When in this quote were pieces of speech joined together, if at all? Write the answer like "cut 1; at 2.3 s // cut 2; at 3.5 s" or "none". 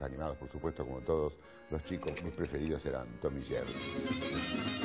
cut 1; at 1.0 s